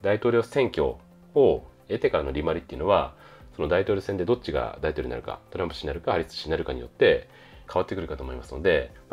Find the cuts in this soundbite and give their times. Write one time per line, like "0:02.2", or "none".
none